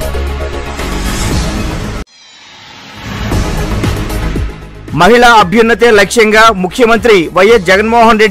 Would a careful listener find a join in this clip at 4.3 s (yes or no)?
yes